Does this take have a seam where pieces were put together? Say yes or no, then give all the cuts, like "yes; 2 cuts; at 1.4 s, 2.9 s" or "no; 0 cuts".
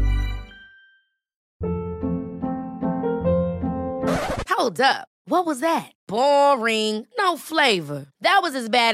yes; 1 cut; at 1.4 s